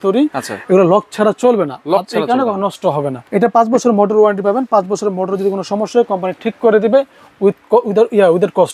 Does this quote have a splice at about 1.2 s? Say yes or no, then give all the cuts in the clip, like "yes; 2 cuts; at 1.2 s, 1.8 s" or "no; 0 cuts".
no; 1 cut; at 3.2 s